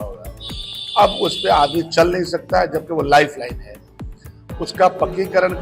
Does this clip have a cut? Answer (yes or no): no